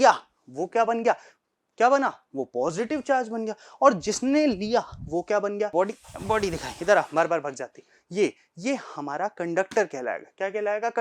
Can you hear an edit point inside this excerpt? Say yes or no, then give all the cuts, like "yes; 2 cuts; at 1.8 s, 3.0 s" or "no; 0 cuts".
yes; 1 cut; at 5.7 s